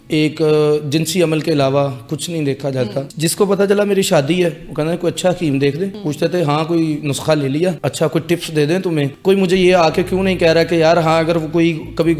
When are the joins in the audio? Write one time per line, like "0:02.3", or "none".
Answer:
0:03.1
0:06.0
0:07.8
0:09.1